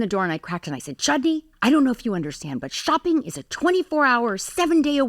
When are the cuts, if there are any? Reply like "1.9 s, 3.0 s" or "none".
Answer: 1.5 s